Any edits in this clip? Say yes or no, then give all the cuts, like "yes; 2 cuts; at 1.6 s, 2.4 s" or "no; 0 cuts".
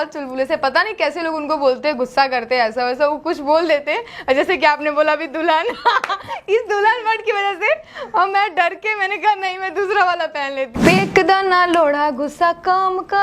yes; 1 cut; at 10.7 s